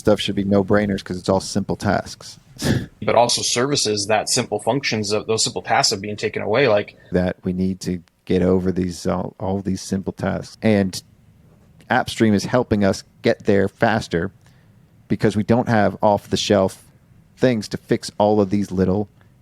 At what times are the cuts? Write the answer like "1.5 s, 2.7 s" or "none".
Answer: 3.0 s, 7.1 s, 10.5 s, 11.7 s